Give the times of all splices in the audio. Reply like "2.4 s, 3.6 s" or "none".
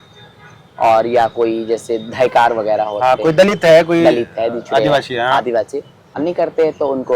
6.1 s